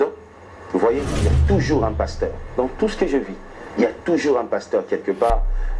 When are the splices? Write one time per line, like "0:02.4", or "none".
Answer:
none